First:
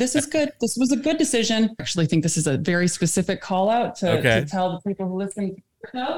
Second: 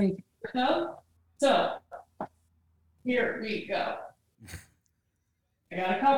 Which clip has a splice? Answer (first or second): first